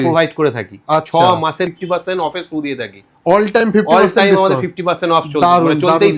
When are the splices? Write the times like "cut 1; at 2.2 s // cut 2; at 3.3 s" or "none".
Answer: cut 1; at 1.7 s